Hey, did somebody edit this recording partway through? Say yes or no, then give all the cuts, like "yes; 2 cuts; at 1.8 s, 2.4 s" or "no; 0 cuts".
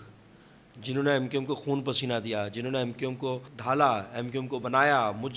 yes; 1 cut; at 3.5 s